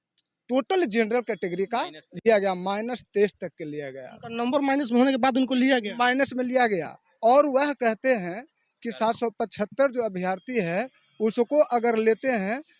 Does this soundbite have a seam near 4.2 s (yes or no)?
no